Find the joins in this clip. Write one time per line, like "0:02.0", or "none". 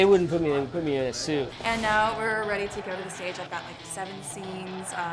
0:01.5